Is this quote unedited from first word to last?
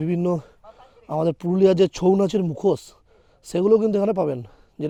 yes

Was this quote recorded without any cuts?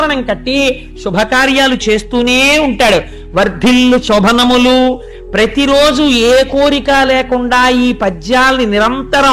yes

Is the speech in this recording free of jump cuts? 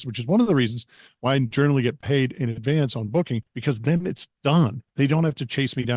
no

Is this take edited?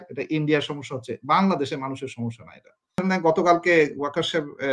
yes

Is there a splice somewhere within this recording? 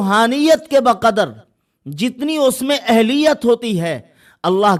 no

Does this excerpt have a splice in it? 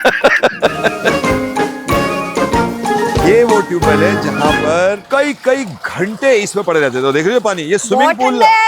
no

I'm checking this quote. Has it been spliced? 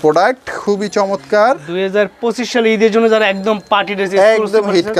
no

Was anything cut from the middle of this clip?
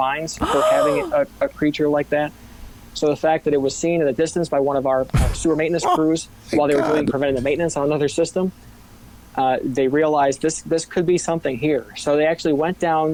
no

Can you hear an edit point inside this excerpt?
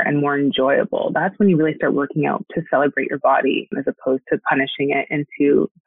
yes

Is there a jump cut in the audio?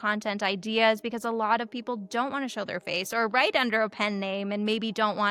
no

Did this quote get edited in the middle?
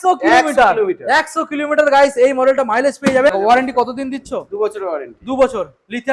yes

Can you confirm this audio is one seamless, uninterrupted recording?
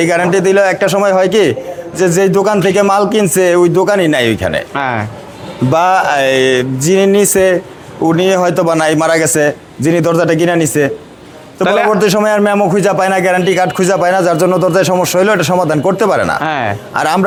yes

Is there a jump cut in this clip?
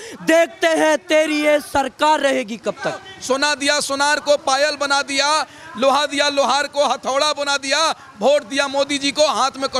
yes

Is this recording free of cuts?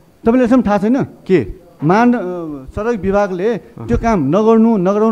yes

